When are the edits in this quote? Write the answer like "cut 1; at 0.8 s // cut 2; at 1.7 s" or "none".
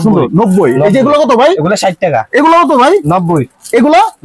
none